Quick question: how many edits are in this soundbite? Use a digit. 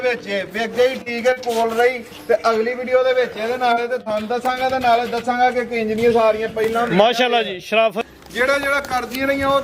1